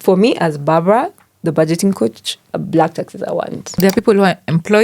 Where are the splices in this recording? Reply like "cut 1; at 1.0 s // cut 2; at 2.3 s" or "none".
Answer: cut 1; at 2.5 s // cut 2; at 3.8 s